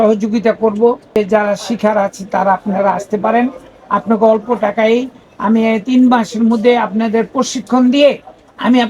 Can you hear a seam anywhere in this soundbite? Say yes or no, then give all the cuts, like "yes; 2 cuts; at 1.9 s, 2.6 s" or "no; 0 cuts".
yes; 1 cut; at 1.2 s